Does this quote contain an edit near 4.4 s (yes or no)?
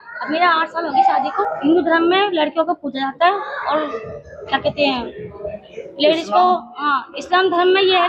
no